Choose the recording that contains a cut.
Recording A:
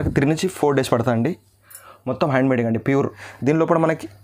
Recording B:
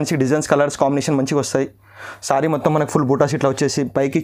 A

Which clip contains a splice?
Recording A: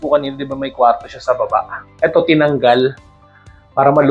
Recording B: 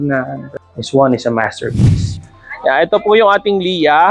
B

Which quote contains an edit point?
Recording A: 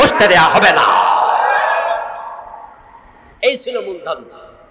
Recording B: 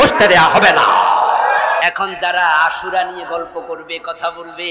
B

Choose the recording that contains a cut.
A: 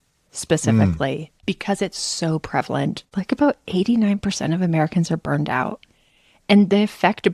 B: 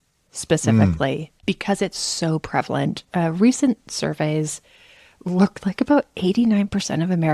A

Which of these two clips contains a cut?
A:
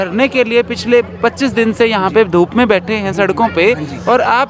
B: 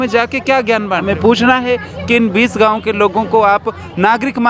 B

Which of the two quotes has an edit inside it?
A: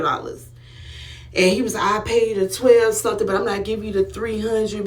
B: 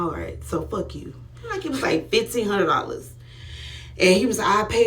B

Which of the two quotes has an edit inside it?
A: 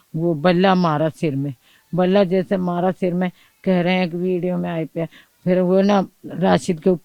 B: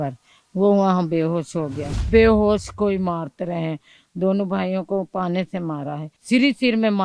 B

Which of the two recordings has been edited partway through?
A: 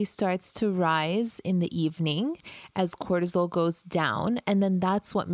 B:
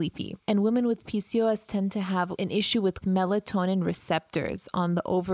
B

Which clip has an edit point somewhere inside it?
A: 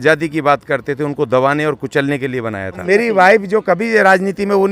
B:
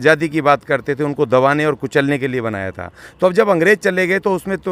A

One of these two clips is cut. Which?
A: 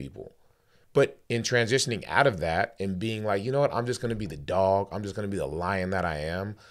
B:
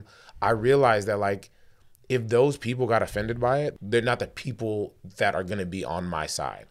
B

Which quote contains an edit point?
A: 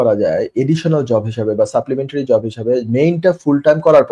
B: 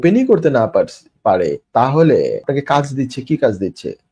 B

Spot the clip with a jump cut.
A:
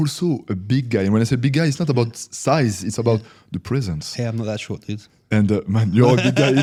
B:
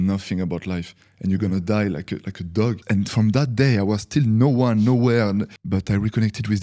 B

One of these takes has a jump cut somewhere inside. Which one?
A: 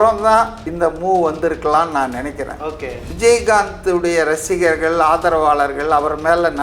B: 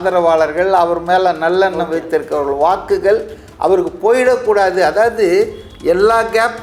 A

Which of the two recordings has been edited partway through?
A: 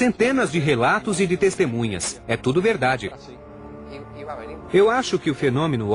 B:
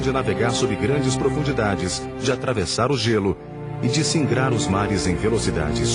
A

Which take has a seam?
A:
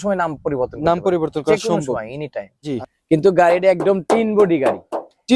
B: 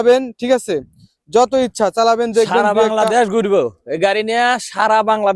A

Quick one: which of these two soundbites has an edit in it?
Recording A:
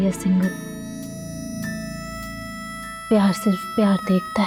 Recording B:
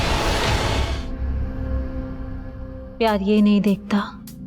B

